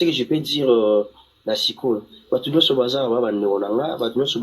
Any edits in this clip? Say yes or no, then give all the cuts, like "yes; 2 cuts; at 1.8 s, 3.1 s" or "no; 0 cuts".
yes; 1 cut; at 1.7 s